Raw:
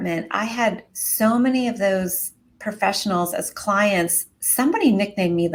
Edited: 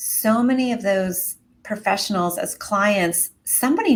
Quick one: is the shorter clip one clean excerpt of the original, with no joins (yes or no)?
yes